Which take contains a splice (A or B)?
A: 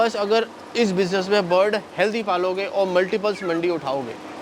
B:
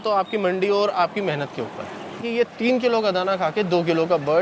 B